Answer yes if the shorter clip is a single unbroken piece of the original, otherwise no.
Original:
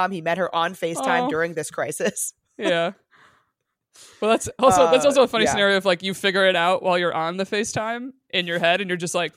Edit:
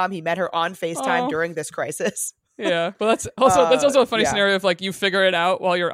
no